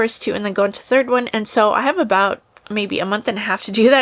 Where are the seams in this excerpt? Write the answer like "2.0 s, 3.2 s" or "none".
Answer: 1.3 s